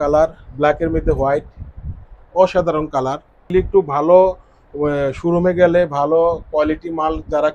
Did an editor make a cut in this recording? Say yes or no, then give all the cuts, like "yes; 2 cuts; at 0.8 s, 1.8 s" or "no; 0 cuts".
yes; 1 cut; at 3.5 s